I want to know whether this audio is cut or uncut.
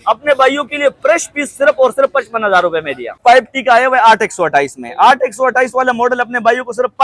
cut